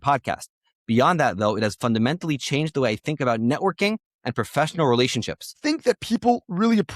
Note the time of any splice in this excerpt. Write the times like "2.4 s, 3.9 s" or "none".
5.6 s

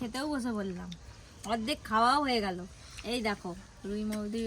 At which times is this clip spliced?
none

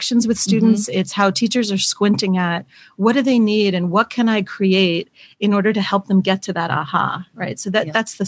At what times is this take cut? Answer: none

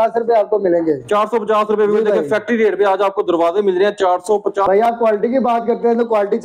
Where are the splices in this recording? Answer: 4.6 s

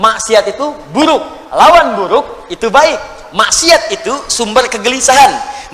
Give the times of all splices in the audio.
none

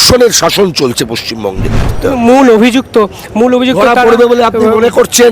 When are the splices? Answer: 1.9 s

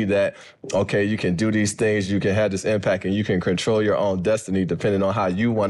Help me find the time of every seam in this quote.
none

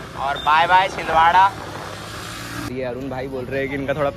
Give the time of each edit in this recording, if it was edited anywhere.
2.7 s

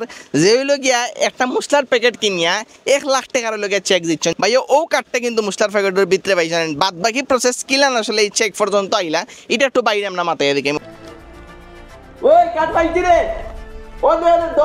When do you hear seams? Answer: 4.3 s, 10.8 s

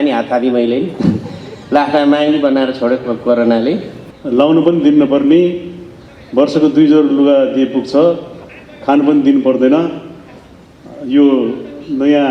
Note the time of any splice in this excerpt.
4.2 s

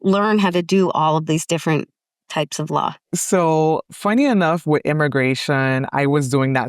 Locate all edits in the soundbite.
3.0 s

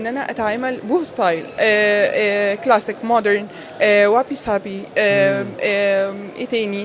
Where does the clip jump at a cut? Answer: none

